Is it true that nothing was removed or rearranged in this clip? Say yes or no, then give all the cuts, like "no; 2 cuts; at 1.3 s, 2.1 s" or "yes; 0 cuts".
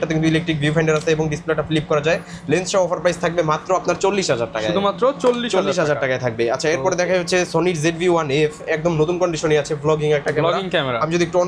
yes; 0 cuts